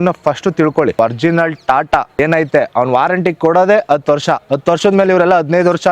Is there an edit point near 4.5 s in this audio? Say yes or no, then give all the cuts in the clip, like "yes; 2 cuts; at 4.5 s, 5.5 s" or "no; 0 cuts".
yes; 3 cuts; at 1.0 s, 2.1 s, 4.5 s